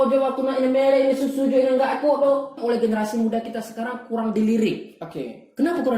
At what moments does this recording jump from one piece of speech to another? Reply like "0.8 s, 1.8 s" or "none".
2.6 s